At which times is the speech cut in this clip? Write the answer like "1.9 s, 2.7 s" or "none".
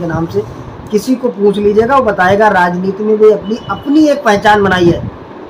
none